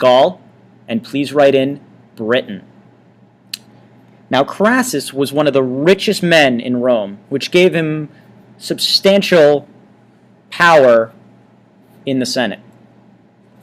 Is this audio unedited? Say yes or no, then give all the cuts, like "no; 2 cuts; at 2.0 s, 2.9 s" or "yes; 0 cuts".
no; 1 cut; at 7.9 s